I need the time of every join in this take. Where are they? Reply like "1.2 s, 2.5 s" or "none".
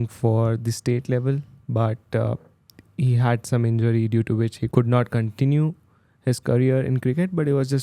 4.6 s